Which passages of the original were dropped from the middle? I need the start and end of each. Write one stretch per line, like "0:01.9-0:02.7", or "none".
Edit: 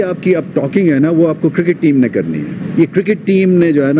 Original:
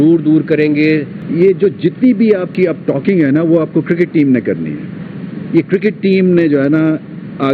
0:04.9-0:05.3